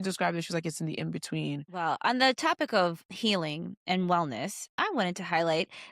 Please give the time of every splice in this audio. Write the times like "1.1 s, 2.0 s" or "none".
1.7 s, 3.1 s, 4.6 s